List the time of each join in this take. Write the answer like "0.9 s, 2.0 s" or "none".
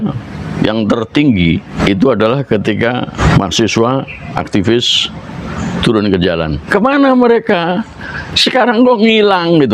1.7 s, 3.2 s, 6.6 s